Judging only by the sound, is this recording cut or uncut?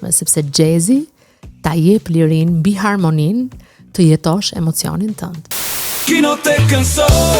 cut